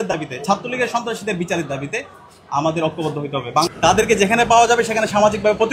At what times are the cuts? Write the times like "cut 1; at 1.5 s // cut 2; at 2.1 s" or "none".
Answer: cut 1; at 3.7 s